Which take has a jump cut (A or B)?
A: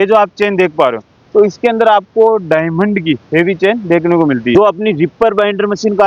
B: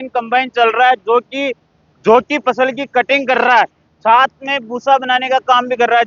A